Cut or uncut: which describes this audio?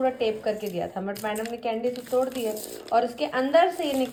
uncut